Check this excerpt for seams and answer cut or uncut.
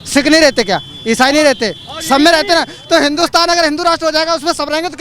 uncut